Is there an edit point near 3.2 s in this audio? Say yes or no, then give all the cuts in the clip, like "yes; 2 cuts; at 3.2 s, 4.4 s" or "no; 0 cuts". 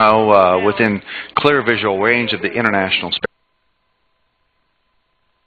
no; 0 cuts